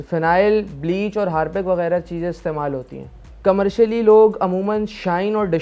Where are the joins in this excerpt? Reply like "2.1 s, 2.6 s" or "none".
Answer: none